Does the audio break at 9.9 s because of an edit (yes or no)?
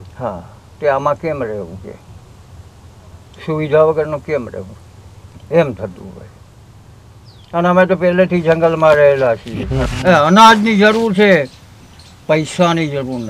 yes